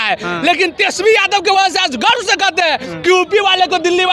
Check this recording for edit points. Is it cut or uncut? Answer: uncut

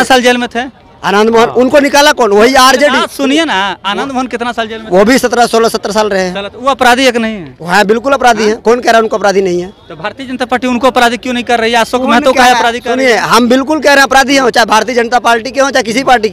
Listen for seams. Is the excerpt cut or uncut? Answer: uncut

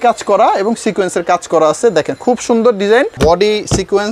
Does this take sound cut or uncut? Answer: cut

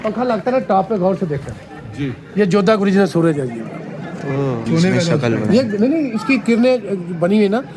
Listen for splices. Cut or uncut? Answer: cut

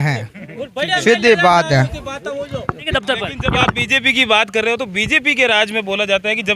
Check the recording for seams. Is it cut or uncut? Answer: cut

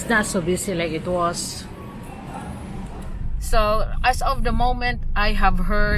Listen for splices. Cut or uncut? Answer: cut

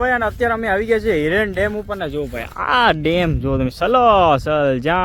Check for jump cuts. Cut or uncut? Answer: uncut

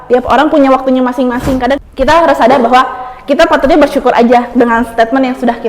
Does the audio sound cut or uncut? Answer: cut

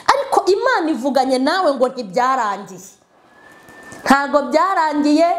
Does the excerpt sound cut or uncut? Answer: uncut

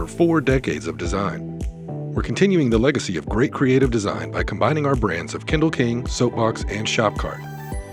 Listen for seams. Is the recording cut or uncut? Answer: uncut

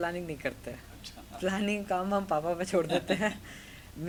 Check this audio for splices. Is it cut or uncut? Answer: uncut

